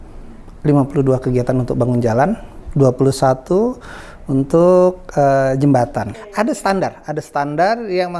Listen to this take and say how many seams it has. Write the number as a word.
one